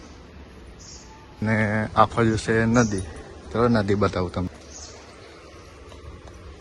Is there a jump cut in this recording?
yes; 2 cuts; at 1.4 s, 4.5 s

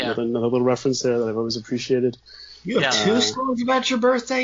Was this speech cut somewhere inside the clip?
no; 0 cuts

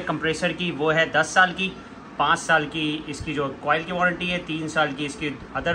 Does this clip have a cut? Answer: no; 0 cuts

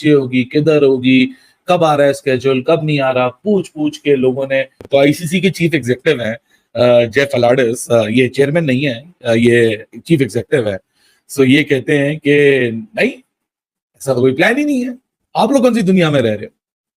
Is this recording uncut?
yes; 0 cuts

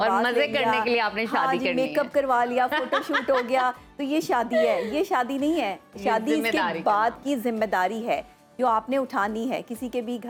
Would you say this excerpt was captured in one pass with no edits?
yes; 0 cuts

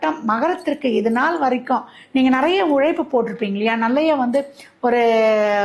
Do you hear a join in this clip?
no; 0 cuts

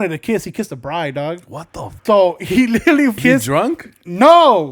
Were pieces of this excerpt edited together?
yes; 2 cuts; at 2.0 s, 3.1 s

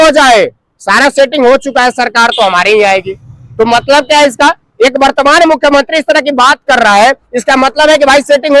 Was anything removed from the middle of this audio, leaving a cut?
no; 0 cuts

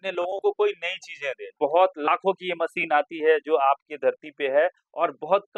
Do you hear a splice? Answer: yes; 1 cut; at 1.5 s

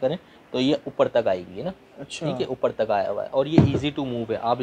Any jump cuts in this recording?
no; 0 cuts

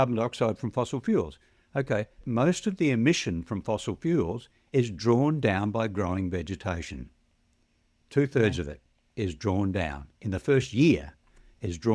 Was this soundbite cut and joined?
yes; 1 cut; at 2.2 s

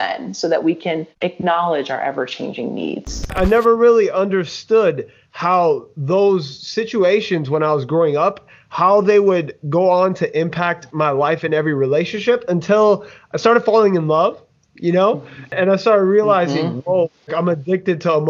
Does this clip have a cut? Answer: yes; 3 cuts; at 3.3 s, 15.5 s, 17.2 s

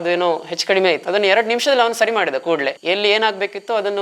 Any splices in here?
yes; 2 cuts; at 1.0 s, 2.8 s

